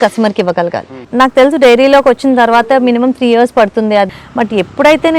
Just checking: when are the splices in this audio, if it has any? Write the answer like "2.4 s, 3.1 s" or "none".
0.9 s, 4.1 s